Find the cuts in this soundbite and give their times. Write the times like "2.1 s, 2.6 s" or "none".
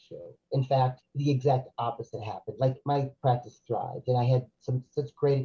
1.1 s, 2.9 s